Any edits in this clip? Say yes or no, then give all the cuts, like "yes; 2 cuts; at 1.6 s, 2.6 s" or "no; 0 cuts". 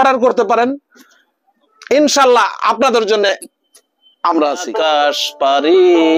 yes; 1 cut; at 4.7 s